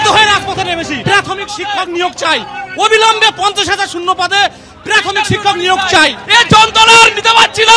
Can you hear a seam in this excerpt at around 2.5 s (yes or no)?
no